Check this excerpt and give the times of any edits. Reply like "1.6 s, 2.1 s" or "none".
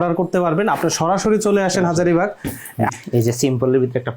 2.9 s